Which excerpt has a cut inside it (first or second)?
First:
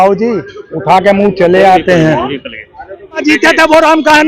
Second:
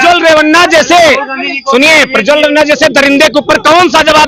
first